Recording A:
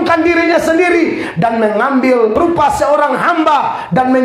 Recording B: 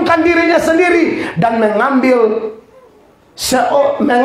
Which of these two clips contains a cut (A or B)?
A